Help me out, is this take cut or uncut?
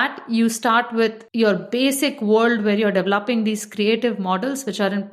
cut